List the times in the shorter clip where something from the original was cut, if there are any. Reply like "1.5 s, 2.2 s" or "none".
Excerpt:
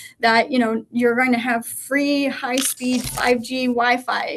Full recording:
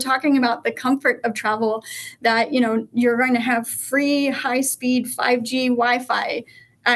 none